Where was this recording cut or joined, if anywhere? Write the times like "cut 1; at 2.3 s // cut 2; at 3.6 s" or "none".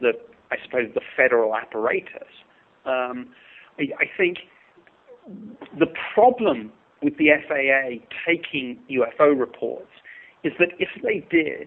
cut 1; at 8.8 s